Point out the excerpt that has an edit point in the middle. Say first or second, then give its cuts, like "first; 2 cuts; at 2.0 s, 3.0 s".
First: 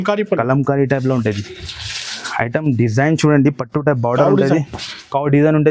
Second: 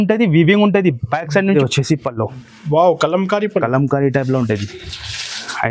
second; 1 cut; at 1.6 s